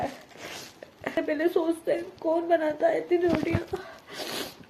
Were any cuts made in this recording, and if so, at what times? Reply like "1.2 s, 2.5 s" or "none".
1.2 s